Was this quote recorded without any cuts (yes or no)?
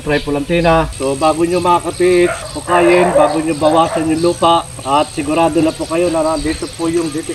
no